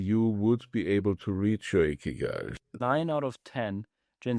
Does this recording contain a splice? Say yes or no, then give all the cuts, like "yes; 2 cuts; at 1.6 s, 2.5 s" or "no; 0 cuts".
yes; 1 cut; at 2.6 s